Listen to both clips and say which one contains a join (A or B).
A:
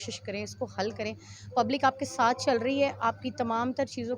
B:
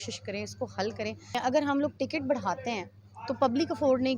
B